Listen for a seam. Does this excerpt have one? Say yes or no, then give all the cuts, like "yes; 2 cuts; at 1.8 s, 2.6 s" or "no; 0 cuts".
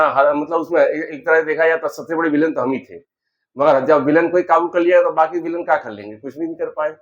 no; 0 cuts